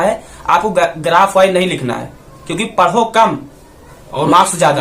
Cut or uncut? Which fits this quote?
uncut